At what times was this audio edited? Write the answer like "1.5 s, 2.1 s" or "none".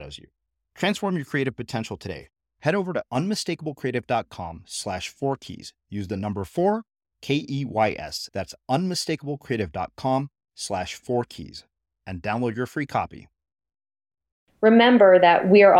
14.5 s